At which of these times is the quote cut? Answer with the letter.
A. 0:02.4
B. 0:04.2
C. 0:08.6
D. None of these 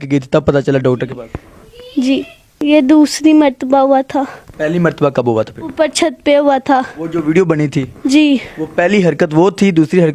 A